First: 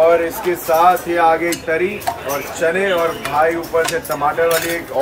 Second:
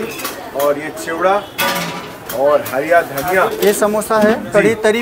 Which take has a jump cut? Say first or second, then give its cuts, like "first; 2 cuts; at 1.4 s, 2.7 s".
second; 1 cut; at 3.5 s